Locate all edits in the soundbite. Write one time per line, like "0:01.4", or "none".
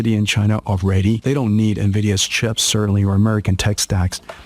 0:01.2